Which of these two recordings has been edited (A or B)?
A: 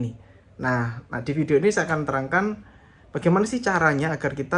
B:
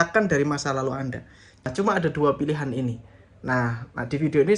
B